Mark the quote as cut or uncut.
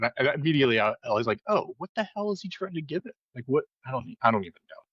uncut